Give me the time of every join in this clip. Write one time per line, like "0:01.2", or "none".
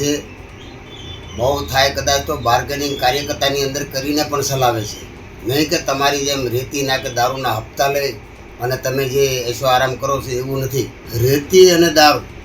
0:11.0